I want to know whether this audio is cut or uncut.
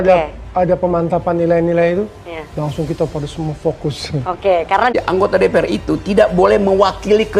cut